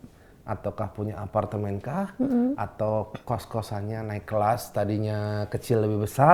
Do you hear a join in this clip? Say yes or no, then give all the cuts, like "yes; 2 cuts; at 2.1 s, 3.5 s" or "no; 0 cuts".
no; 0 cuts